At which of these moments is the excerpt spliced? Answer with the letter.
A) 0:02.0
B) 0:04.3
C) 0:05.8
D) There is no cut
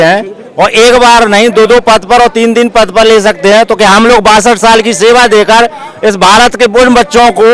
D